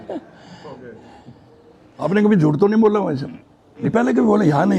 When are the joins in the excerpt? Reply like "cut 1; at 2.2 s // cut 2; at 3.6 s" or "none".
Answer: cut 1; at 2.0 s // cut 2; at 3.9 s